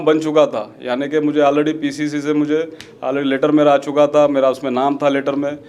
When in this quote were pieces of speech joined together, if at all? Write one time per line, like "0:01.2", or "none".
none

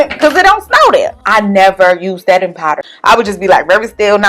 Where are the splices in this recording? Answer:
0:01.2
0:02.8

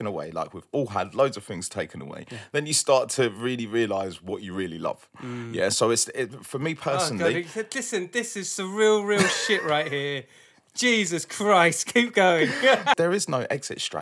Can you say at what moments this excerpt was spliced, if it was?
0:13.0

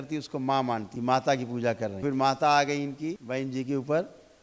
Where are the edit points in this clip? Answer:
0:00.9
0:02.0
0:03.2

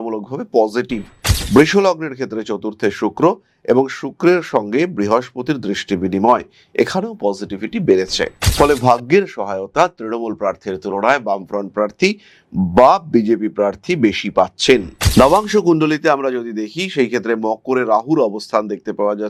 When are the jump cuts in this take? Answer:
none

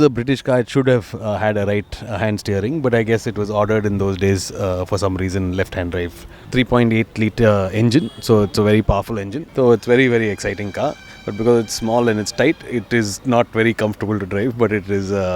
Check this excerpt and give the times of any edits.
0:06.4
0:09.4

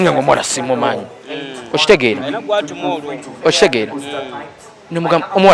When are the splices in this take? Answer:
none

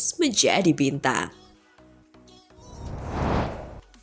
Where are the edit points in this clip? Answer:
0:01.4
0:02.7

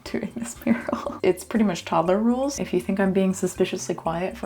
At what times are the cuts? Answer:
0:01.1
0:02.6

